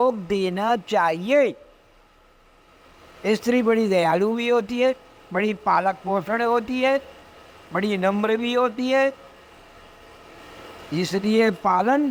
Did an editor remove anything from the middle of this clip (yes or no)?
no